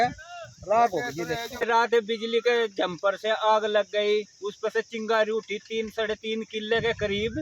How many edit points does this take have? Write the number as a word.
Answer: one